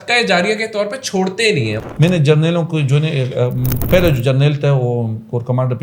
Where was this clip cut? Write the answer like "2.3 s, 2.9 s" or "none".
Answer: 1.8 s, 3.8 s